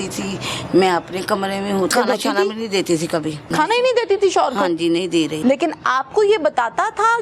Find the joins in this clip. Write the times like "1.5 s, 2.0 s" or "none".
1.9 s, 3.5 s, 5.3 s

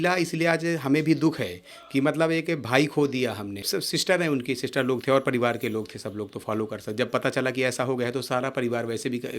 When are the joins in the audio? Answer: 3.7 s

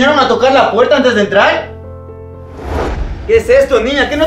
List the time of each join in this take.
2.8 s

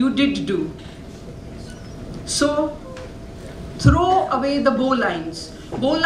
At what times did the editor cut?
none

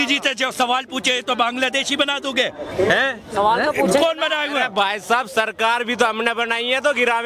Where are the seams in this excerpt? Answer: none

